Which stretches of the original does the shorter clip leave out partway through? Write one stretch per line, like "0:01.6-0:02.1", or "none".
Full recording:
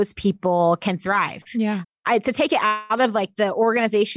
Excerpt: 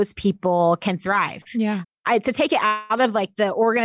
none